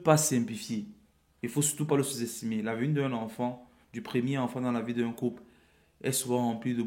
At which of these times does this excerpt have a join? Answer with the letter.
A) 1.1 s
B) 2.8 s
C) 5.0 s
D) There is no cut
D